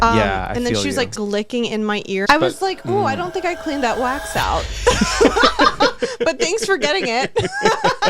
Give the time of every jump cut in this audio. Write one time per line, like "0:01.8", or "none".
0:01.2
0:02.2